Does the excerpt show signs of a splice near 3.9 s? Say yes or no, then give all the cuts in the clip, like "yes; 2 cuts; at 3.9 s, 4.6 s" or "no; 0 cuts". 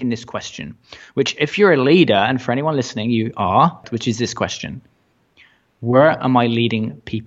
yes; 1 cut; at 3.9 s